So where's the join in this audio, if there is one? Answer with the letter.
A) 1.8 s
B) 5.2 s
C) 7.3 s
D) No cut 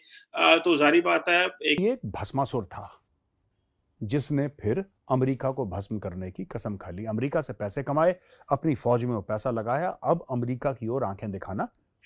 A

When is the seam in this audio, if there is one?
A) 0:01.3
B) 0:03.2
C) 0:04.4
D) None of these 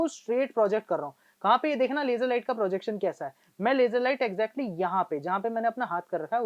D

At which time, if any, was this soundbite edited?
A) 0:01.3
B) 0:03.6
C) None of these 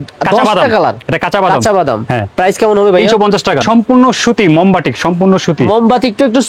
B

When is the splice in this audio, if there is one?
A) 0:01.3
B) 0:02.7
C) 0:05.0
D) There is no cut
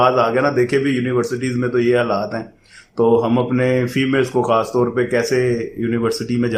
D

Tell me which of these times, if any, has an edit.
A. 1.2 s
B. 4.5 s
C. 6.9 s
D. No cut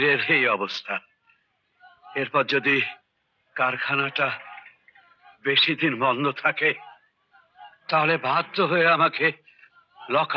D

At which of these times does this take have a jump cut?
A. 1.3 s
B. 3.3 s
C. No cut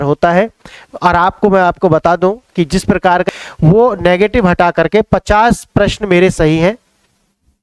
B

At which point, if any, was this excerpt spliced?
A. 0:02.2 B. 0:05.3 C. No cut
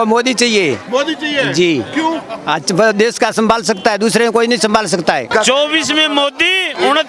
B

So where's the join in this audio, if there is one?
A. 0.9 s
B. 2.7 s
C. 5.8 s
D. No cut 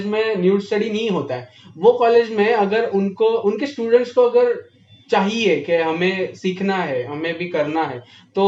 D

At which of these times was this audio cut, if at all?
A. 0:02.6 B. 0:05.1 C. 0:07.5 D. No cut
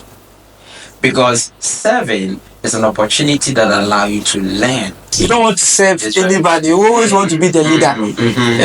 B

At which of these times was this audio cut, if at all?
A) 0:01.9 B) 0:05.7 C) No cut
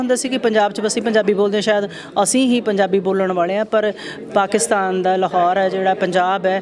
C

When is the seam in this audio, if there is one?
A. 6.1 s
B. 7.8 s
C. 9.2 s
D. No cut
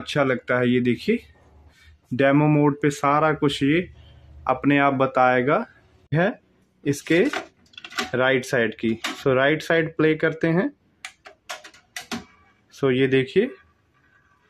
A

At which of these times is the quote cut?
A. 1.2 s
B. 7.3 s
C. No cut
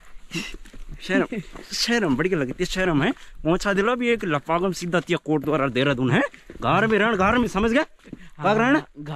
C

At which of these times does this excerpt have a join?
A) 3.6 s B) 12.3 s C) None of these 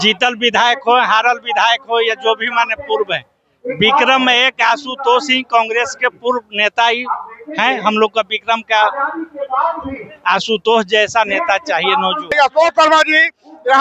B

